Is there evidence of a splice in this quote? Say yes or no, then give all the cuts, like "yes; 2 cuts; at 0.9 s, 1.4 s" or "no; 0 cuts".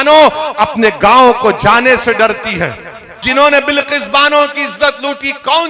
yes; 1 cut; at 3.2 s